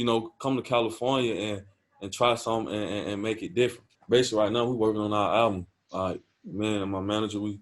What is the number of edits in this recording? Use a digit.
1